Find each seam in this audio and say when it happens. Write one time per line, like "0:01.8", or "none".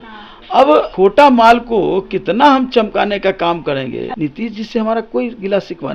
0:00.9
0:04.1

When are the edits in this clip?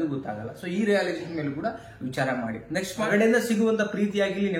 0:03.1

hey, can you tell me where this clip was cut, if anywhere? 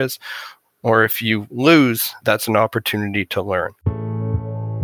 0:02.1
0:03.8

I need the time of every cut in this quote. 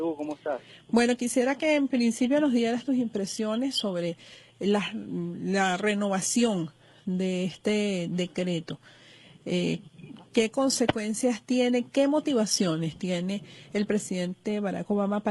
none

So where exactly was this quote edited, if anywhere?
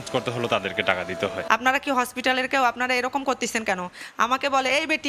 0:01.4

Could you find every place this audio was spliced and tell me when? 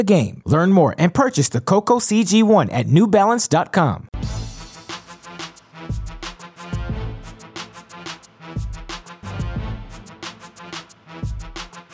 0:04.1
0:06.9

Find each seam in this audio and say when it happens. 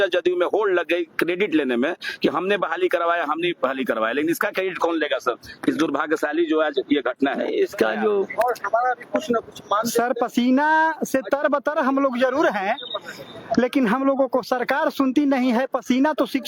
0:08.3

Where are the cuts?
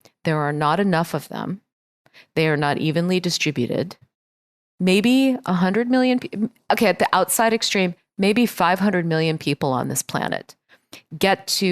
0:04.7

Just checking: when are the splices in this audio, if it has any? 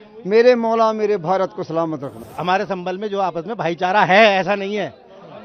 0:02.2

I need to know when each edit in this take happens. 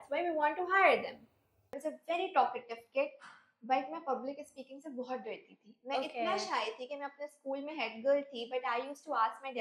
0:01.9

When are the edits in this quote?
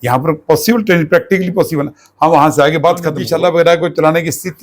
0:03.2

